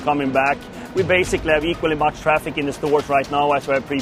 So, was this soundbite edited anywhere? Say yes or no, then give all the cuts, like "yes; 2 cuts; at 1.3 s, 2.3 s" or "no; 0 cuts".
no; 0 cuts